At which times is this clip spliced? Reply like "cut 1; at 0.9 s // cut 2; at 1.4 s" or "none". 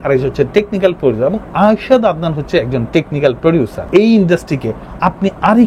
none